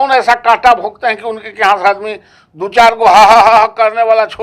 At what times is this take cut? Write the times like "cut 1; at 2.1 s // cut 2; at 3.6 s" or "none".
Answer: none